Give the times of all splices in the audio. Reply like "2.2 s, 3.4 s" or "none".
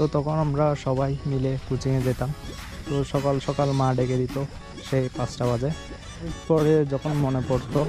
6.3 s